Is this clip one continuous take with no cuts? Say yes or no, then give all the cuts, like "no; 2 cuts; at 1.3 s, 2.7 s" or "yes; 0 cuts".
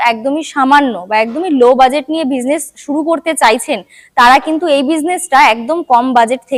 yes; 0 cuts